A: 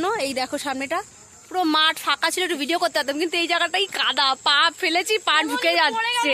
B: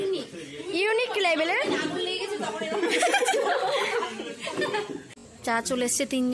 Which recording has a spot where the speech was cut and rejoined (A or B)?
B